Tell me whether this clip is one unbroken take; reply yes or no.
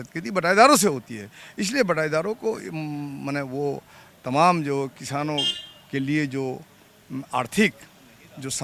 yes